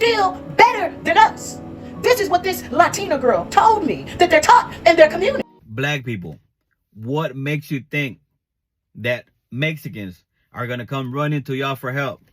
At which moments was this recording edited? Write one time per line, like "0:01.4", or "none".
0:05.5

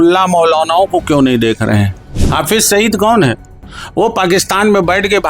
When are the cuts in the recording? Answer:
0:02.1

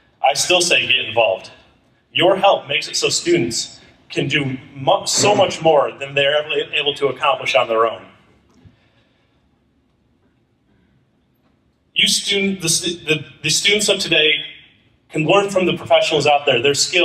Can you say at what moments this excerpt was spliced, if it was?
0:07.9

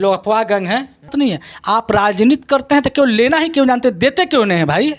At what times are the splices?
0:01.1

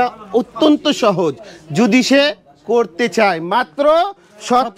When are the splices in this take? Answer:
none

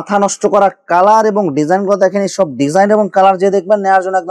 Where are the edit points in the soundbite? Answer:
none

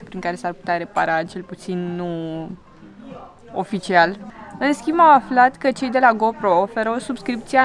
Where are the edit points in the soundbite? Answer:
none

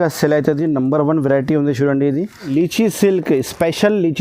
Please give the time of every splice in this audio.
0:02.5

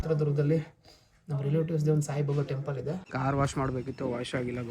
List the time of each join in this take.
0:03.1

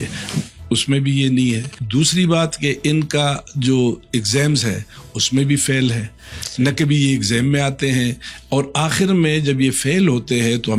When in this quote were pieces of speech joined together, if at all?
none

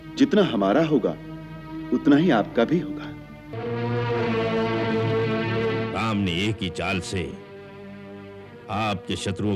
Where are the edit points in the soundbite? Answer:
0:03.5

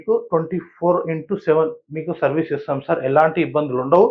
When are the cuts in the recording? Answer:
none

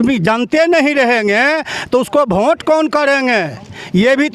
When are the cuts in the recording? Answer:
none

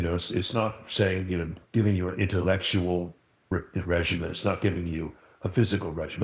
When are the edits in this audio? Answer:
0:01.6
0:03.5

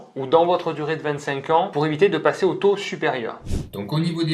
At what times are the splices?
0:03.3

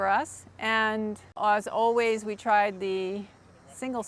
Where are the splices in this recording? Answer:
0:01.3

